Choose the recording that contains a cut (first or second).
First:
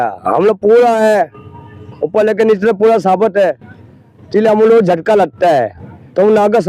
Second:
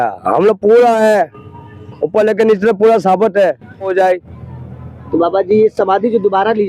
second